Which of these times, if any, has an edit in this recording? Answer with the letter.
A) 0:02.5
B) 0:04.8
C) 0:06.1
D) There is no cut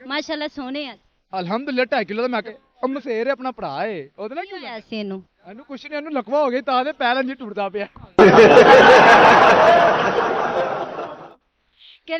A